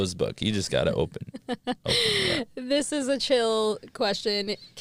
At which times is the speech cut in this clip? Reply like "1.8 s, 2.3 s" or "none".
none